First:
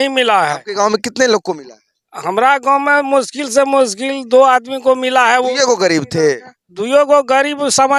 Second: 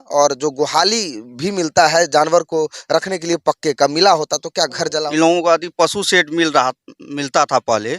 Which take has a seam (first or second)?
second